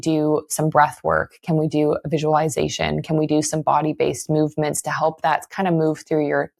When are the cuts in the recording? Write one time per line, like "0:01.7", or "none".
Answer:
none

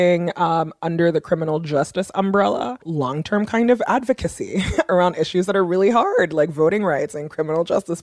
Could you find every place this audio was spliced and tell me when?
0:02.9
0:04.9

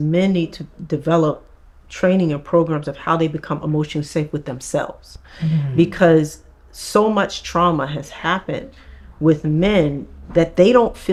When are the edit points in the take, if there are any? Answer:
none

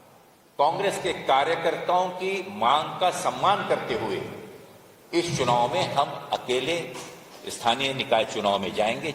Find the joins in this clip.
none

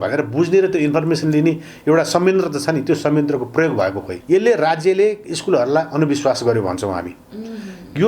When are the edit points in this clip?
0:04.1

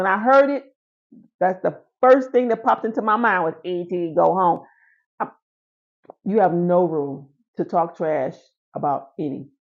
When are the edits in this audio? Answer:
none

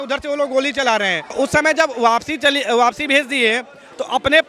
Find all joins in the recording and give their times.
0:01.3

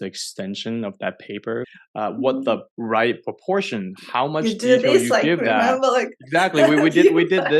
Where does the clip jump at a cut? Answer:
0:01.7

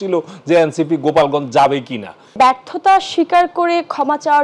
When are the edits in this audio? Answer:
0:02.4

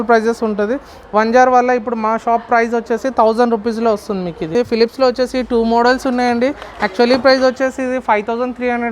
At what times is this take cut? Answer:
0:04.5

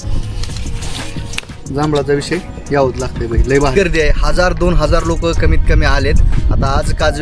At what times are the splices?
0:03.7

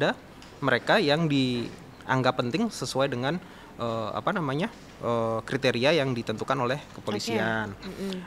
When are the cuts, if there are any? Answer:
none

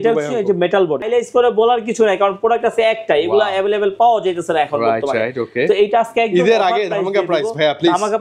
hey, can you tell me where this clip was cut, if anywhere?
0:01.0

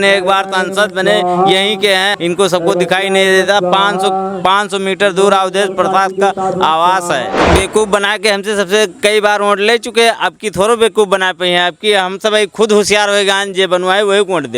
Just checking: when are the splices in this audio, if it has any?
0:02.1
0:07.4

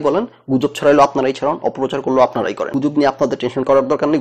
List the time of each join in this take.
0:02.7

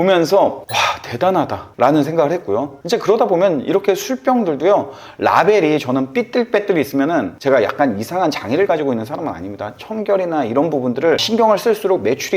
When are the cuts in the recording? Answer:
none

